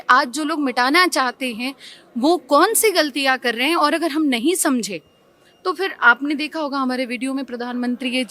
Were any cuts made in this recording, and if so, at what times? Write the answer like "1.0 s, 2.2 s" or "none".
none